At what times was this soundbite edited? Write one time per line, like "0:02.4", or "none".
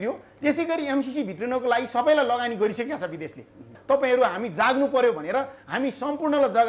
0:03.7